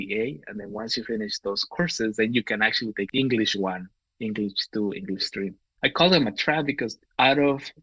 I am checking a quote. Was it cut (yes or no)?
yes